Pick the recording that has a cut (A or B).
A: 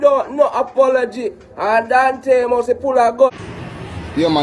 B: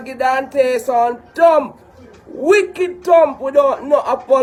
A